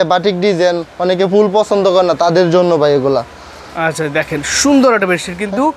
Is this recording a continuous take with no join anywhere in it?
yes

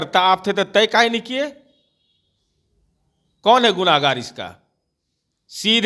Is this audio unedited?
yes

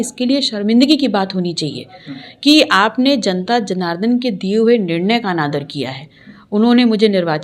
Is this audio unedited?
yes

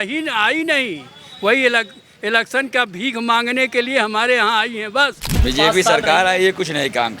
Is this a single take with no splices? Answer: no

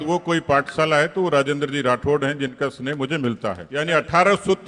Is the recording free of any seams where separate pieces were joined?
no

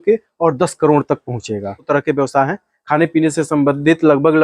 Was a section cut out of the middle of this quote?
yes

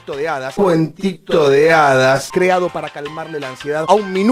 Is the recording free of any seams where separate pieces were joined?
yes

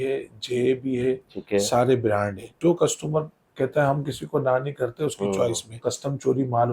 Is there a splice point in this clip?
yes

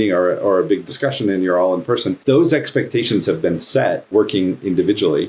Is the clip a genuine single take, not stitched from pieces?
no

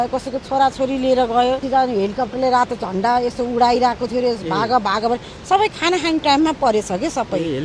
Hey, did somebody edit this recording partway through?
yes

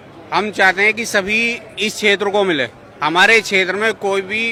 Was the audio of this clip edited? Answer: no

